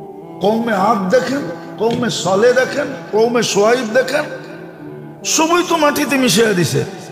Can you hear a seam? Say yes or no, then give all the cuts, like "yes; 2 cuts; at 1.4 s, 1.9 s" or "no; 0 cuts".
no; 0 cuts